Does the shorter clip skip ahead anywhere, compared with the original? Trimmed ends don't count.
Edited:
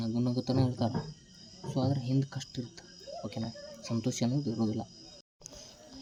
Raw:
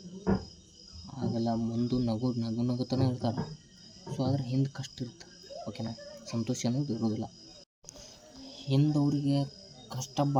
no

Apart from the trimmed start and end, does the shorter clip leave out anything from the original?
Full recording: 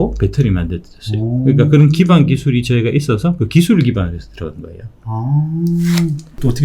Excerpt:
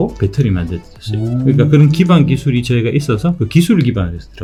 no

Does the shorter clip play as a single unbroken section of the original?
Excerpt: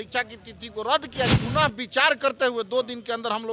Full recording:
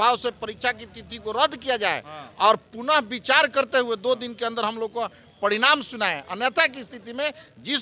no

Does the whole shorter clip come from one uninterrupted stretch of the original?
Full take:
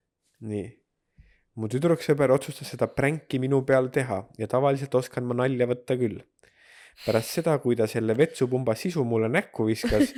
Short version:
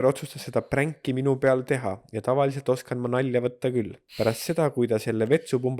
no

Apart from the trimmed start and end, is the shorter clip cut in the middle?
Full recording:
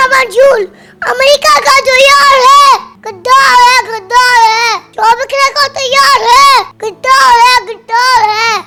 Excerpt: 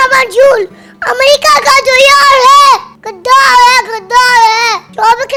no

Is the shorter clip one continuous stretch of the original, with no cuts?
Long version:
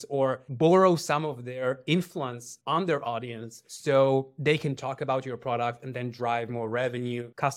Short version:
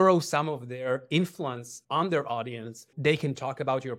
no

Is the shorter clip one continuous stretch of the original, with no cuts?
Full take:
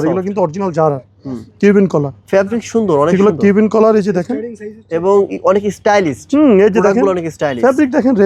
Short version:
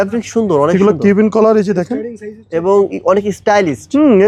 yes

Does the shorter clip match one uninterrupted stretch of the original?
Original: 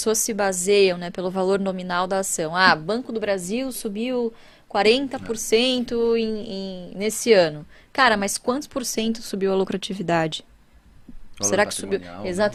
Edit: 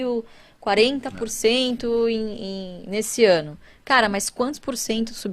yes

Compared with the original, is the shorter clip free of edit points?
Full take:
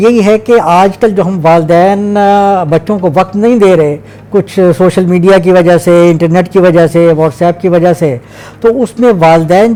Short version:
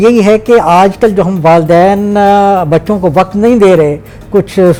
yes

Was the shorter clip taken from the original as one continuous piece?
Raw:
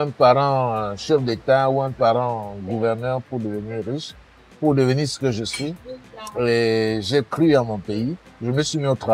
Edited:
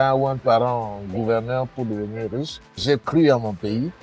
no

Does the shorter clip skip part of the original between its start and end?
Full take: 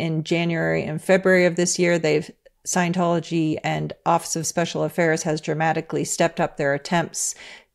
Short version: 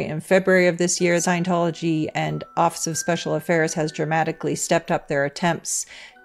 yes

